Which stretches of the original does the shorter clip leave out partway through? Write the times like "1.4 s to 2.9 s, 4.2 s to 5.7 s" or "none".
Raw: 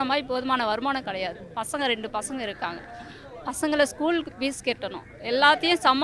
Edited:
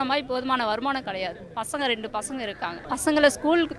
2.8 s to 3.4 s